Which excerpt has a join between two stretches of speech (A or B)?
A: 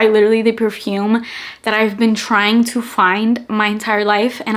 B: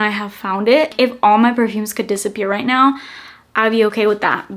B